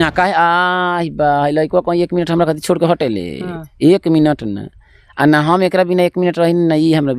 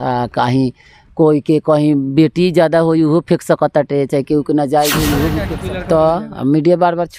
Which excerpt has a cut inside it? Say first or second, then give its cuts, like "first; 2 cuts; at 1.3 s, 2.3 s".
second; 1 cut; at 5.5 s